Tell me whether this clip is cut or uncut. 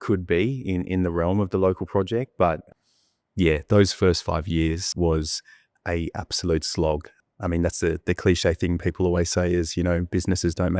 cut